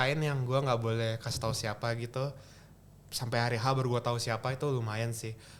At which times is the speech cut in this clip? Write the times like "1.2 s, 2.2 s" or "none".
none